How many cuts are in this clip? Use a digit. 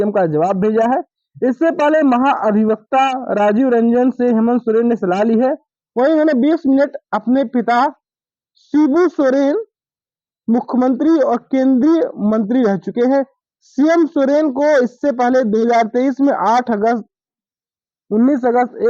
0